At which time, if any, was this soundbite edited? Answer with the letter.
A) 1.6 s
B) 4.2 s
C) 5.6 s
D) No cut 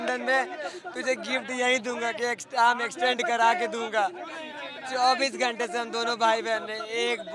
D